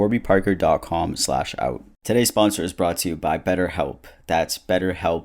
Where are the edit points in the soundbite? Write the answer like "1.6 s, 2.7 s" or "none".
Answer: 1.9 s

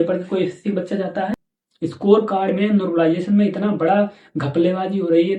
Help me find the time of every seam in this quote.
1.3 s

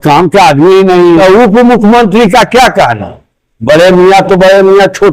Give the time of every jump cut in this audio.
1.2 s

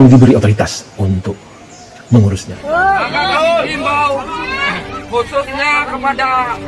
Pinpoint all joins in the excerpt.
2.5 s

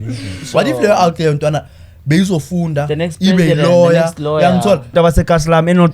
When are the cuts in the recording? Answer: 4.9 s

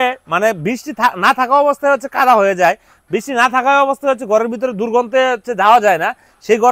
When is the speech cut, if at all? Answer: none

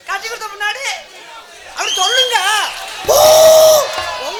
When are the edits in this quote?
none

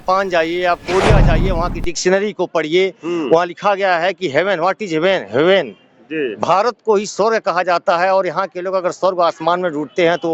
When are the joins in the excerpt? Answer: none

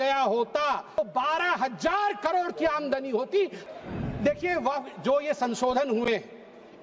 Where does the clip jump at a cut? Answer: 1.0 s, 3.6 s

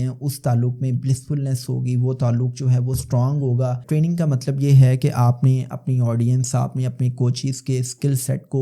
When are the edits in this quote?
3.8 s

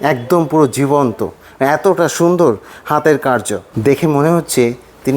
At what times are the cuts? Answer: 3.7 s

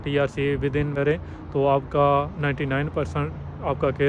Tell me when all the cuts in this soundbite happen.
0.9 s

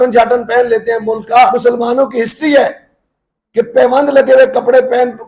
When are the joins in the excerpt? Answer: 1.6 s

